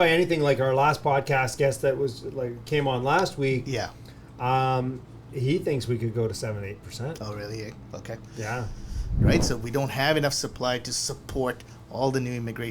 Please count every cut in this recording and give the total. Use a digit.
1